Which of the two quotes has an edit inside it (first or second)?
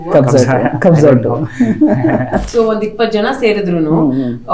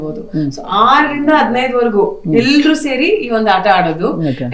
first